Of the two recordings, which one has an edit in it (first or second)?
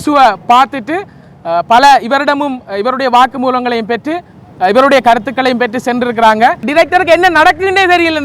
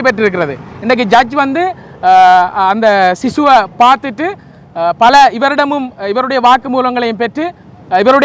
first